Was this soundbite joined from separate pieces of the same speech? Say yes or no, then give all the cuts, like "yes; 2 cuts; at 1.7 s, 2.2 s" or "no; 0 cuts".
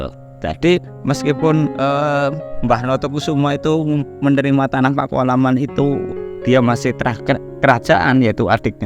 yes; 1 cut; at 1.7 s